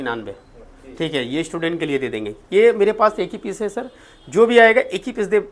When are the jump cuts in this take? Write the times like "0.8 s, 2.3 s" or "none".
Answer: none